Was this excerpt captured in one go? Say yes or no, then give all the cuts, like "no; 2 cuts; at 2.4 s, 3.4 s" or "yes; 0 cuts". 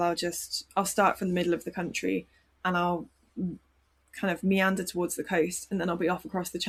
yes; 0 cuts